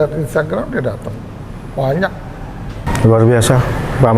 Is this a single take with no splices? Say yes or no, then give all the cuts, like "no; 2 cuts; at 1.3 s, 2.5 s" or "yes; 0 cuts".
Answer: no; 1 cut; at 2.9 s